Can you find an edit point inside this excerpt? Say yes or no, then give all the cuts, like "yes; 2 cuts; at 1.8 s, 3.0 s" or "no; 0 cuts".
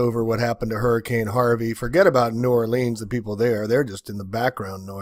no; 0 cuts